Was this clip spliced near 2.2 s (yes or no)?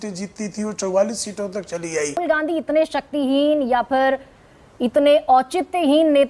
yes